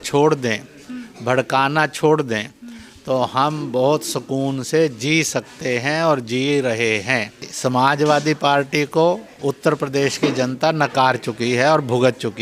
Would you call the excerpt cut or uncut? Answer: cut